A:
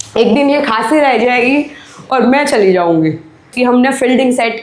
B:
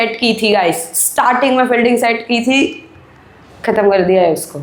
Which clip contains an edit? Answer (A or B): A